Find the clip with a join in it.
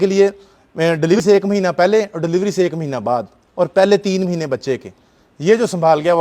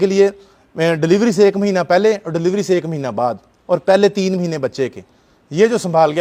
first; 1 cut; at 1.2 s

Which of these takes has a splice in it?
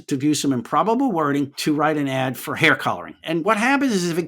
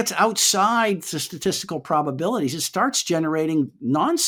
first; 2 cuts; at 1.6 s, 3.4 s

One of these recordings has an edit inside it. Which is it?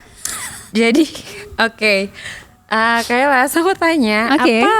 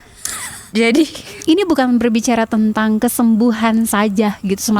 second; 1 cut; at 1.3 s

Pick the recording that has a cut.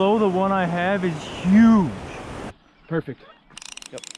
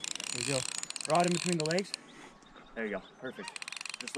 first; 1 cut; at 2.5 s

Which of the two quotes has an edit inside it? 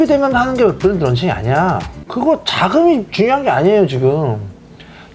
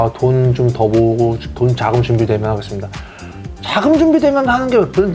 first; 1 cut; at 2.0 s

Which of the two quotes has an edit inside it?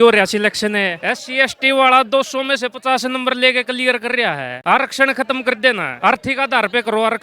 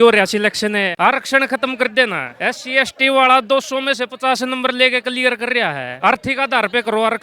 first; 3 cuts; at 0.9 s, 4.6 s, 5.9 s

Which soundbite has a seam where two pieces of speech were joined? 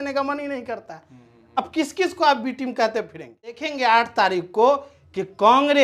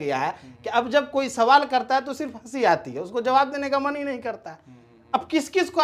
first; 1 cut; at 3.7 s

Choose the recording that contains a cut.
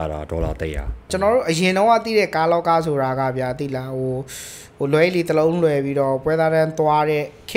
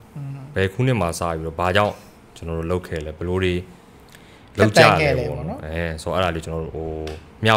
first; 1 cut; at 1.1 s

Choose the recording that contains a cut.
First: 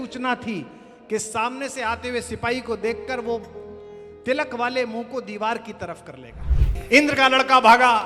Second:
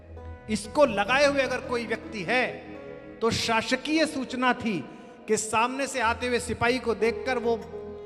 first; 1 cut; at 6.7 s

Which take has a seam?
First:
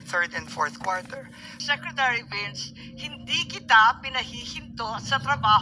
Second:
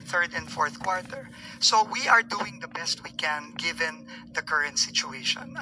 first; 1 cut; at 1.6 s

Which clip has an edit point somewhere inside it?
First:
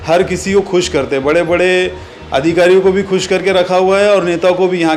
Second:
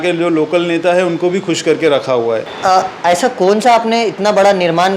second; 1 cut; at 2.5 s

